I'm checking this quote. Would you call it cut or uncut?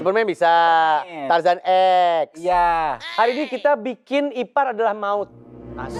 uncut